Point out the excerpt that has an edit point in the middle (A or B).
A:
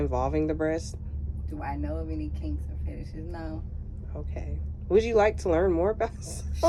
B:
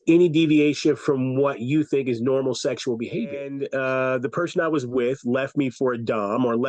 B